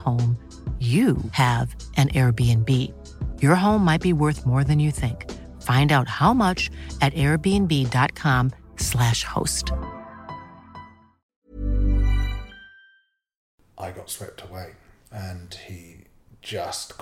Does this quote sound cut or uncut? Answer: cut